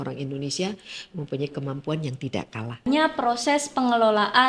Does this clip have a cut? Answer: yes; 1 cut; at 2.8 s

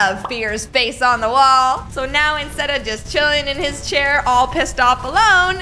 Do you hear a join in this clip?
no; 0 cuts

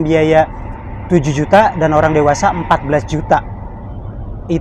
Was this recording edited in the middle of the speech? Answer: no; 0 cuts

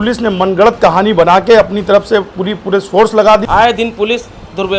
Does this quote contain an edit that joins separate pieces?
yes; 1 cut; at 3.4 s

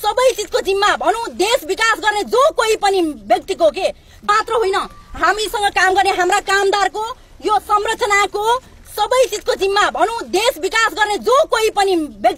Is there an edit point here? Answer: yes; 1 cut; at 4.3 s

